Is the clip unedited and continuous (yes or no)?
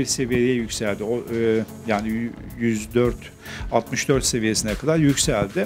yes